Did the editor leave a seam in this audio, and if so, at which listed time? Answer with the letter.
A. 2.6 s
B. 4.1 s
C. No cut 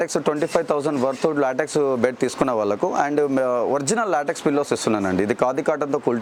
C